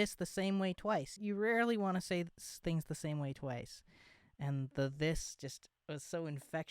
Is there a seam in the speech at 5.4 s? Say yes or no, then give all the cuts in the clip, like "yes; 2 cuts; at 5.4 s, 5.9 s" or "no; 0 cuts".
no; 1 cut; at 1.1 s